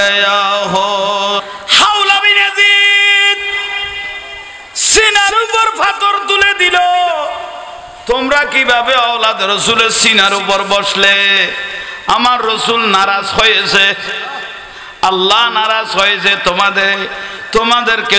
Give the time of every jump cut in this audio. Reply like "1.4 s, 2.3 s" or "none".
1.4 s